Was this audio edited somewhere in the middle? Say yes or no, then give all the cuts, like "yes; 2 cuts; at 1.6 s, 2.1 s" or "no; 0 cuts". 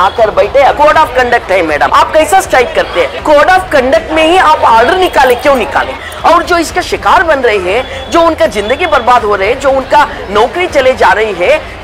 yes; 4 cuts; at 0.8 s, 1.9 s, 3.2 s, 6.1 s